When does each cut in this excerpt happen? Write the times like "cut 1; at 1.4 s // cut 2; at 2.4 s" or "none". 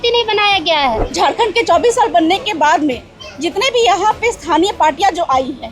cut 1; at 1.0 s